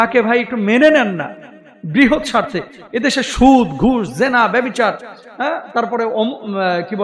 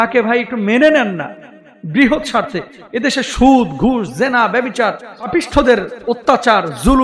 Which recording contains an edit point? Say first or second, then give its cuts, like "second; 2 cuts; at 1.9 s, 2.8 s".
second; 1 cut; at 5.1 s